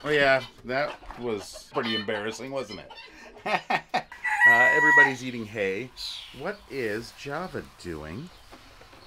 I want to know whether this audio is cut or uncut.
cut